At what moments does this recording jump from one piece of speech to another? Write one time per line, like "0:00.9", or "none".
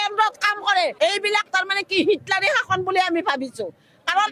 0:00.9